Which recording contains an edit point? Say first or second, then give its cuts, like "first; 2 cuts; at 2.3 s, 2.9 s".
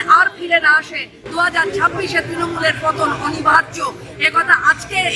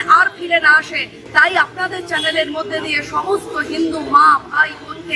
first; 1 cut; at 1.1 s